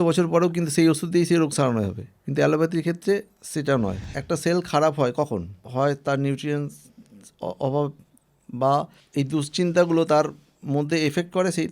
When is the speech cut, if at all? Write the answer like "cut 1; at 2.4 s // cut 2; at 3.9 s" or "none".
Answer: cut 1; at 4.0 s // cut 2; at 5.6 s // cut 3; at 9.0 s